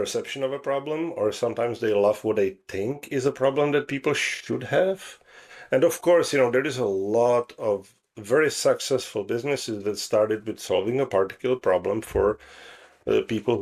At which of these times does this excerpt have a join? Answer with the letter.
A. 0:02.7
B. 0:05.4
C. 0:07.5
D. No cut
D